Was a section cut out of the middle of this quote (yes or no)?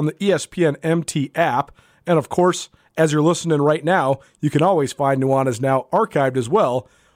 no